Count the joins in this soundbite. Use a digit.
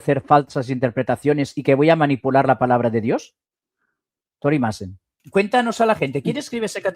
1